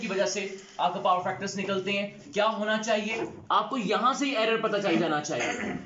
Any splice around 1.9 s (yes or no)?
no